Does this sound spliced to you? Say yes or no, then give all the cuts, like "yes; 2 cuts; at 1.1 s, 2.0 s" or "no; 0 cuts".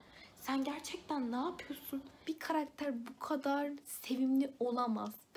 yes; 1 cut; at 2.1 s